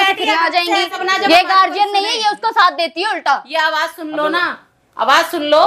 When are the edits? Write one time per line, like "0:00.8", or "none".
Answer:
0:01.0